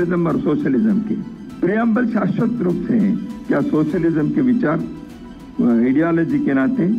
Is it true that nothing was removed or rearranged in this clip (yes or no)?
yes